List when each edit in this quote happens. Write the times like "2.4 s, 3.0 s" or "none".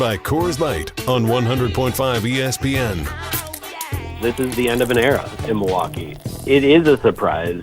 4.1 s